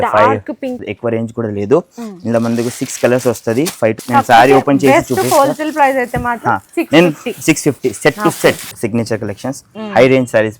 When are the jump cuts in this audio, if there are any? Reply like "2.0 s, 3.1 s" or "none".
0.8 s, 4.0 s, 8.8 s